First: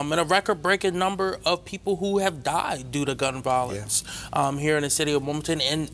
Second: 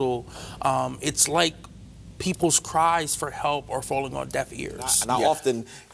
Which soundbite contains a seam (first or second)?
second